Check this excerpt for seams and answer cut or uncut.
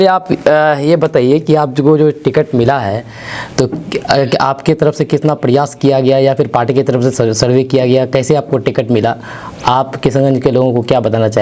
uncut